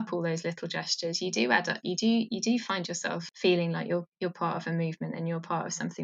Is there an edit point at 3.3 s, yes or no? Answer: yes